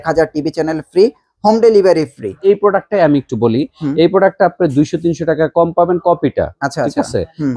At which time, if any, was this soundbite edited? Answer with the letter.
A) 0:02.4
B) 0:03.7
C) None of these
A